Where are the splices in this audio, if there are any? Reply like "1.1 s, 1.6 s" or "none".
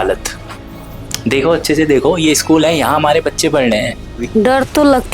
4.2 s